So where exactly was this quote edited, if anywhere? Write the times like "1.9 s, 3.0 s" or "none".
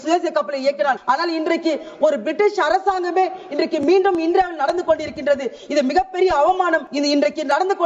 1.0 s, 6.9 s